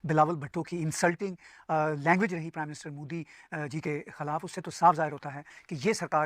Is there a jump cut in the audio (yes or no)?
no